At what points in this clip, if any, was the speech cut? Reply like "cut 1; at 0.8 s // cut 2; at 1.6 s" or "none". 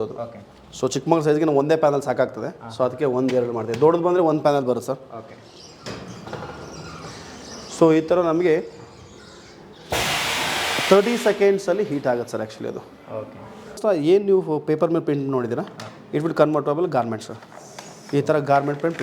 cut 1; at 13.8 s